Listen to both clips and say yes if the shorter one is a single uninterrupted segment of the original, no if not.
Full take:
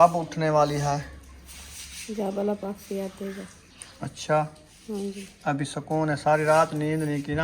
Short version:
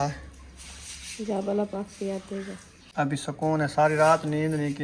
no